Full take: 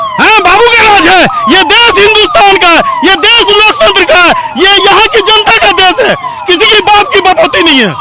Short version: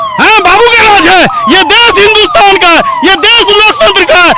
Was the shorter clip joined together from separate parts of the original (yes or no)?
no